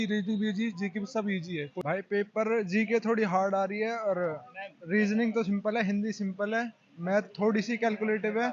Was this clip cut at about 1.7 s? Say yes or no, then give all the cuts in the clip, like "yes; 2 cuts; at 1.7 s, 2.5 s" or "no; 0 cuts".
yes; 1 cut; at 1.7 s